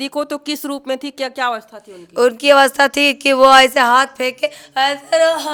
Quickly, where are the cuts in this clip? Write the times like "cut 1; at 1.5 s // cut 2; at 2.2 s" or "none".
none

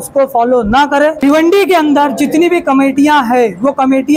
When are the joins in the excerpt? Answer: cut 1; at 1.2 s

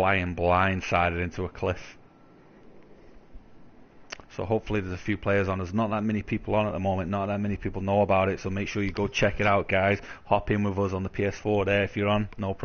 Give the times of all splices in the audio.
cut 1; at 2.4 s

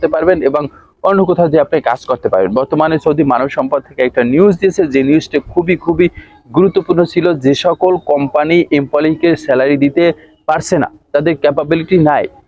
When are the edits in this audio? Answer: none

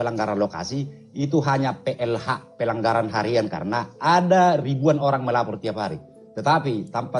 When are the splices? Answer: none

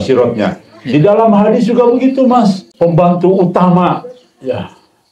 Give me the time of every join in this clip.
cut 1; at 2.7 s

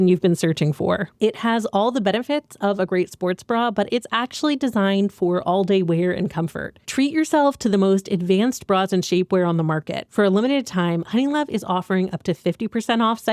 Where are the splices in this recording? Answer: cut 1; at 1.1 s // cut 2; at 6.7 s

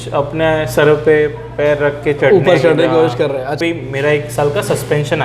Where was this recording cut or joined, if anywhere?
cut 1; at 3.6 s

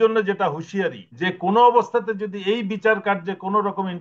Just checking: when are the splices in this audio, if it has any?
cut 1; at 1.1 s

